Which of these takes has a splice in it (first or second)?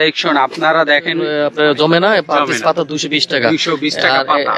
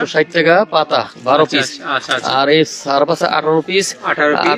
first